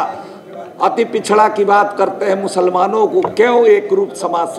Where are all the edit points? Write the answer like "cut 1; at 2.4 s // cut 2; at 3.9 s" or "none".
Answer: none